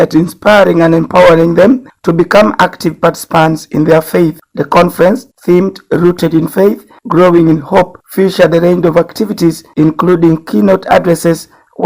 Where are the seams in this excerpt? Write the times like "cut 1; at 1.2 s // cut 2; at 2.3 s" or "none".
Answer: cut 1; at 10.4 s

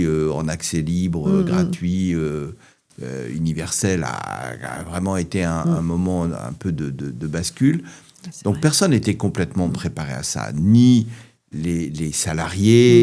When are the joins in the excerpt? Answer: none

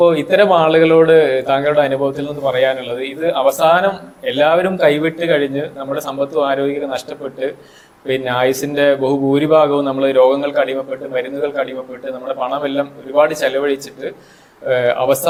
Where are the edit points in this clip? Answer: none

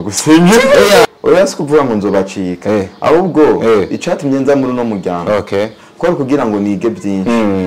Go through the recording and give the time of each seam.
cut 1; at 1.1 s

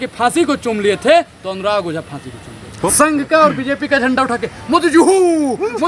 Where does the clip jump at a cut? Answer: cut 1; at 2.7 s

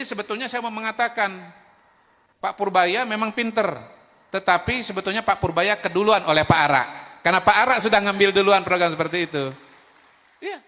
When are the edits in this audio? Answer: none

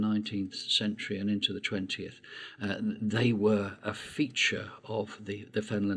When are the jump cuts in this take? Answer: none

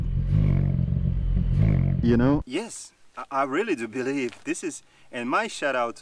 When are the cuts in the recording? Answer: cut 1; at 2.5 s

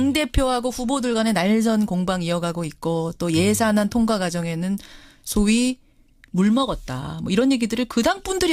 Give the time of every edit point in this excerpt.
cut 1; at 2.8 s

